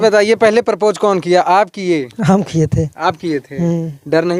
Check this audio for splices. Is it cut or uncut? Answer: uncut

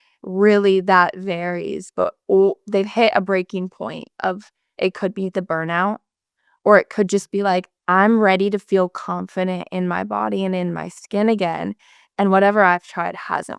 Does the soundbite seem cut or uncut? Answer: uncut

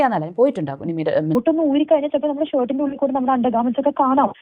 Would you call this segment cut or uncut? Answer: cut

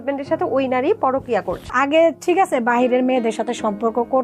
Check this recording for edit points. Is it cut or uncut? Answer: cut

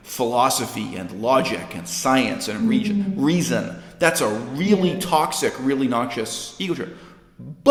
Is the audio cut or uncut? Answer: uncut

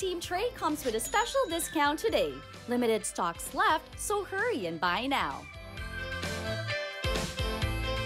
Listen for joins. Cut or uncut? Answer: cut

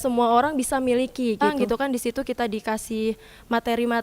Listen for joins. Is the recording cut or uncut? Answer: cut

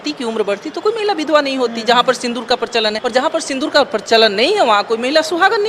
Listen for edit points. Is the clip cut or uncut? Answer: cut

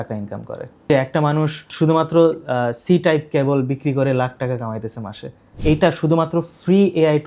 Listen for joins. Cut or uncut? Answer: cut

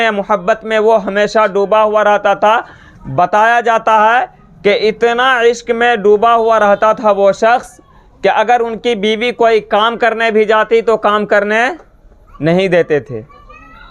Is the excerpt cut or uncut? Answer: uncut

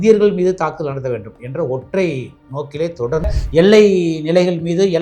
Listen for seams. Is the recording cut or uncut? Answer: cut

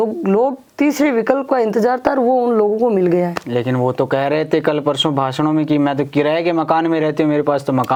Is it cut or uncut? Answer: uncut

